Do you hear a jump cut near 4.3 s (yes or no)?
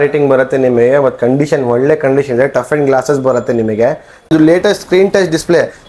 yes